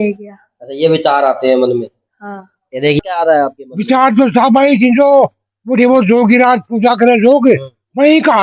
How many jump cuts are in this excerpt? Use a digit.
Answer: 1